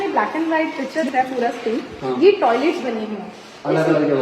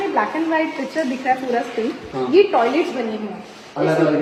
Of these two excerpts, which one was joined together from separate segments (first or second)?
first